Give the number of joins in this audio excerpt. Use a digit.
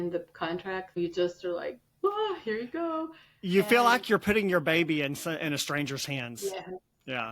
1